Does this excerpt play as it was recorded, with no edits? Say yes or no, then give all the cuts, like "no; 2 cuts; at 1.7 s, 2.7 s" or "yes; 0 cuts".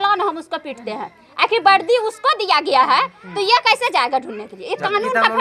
yes; 0 cuts